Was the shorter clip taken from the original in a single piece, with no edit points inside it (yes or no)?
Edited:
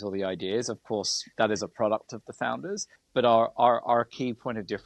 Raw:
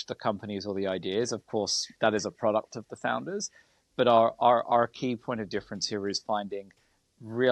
no